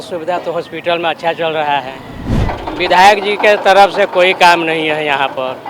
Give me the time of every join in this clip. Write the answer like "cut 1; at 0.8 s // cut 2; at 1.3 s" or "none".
cut 1; at 2.4 s